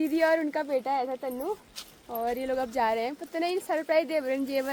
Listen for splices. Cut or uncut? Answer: uncut